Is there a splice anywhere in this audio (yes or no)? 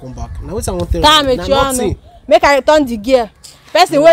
no